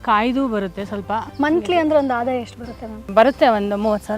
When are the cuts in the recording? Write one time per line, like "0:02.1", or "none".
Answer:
0:01.3
0:03.1

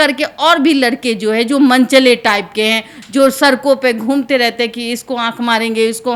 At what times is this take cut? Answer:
none

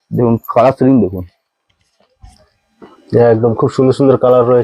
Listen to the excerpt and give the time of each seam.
none

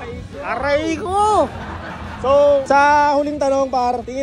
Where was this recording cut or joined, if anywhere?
none

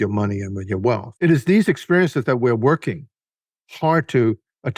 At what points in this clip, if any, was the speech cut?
0:01.1

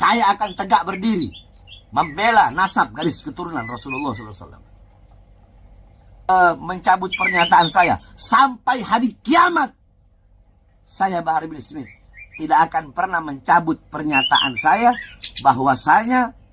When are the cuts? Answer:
0:06.3

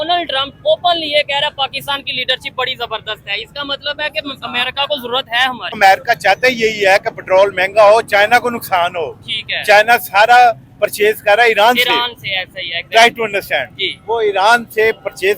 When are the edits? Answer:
0:05.8

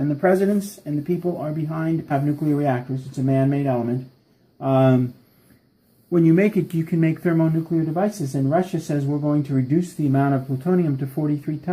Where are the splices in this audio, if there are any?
none

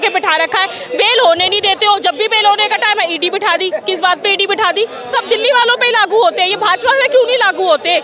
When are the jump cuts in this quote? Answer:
0:05.0

